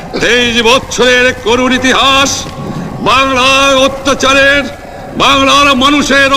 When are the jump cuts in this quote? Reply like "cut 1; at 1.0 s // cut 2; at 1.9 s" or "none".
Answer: none